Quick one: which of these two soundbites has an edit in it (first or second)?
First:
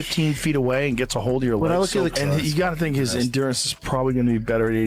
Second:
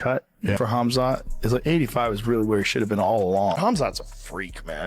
second